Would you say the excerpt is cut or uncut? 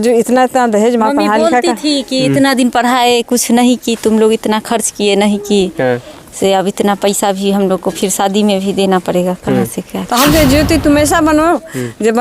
cut